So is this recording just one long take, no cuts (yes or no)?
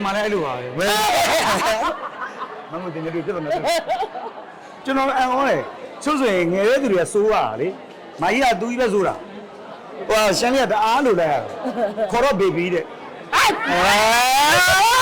no